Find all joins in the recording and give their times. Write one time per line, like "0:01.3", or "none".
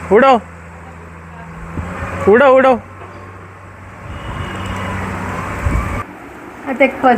0:06.3

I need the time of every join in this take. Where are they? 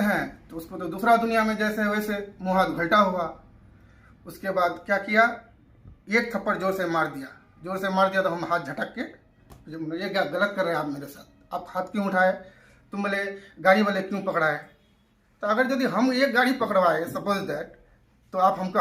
none

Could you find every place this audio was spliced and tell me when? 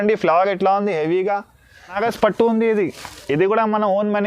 0:02.0

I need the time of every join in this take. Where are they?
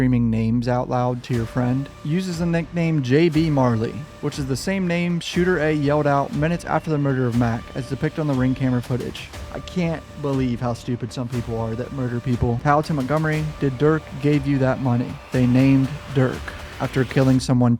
0:01.9
0:12.6
0:15.2

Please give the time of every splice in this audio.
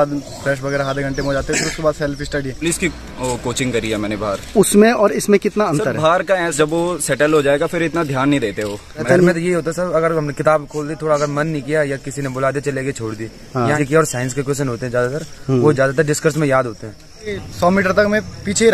0:02.6
0:06.5
0:09.1
0:13.8
0:17.3

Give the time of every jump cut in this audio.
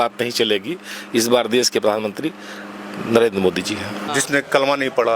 0:04.0

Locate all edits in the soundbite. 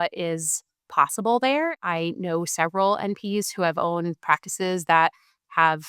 0:01.7

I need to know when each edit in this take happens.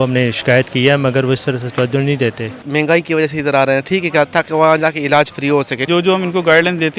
0:02.6
0:05.8

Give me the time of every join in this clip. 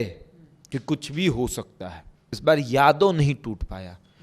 0:02.2

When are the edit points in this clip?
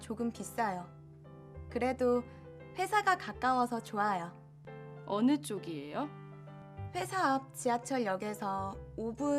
none

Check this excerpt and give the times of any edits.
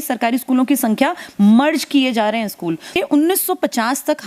0:02.9

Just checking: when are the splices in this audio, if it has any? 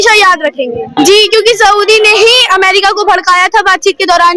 0:00.9

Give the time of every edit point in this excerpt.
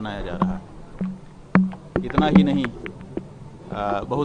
none

